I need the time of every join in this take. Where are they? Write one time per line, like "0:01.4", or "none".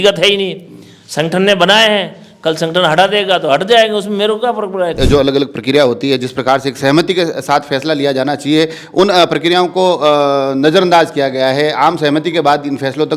0:05.0